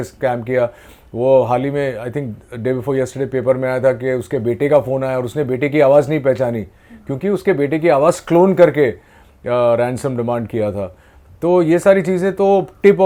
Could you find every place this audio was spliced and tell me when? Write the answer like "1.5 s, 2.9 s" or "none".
none